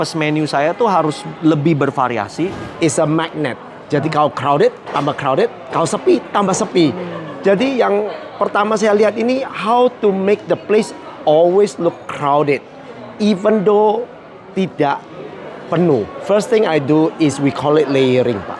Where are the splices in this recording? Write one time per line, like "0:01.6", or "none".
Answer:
0:02.7
0:16.2